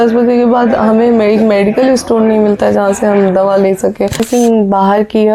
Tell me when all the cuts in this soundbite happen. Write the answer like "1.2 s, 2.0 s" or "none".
4.2 s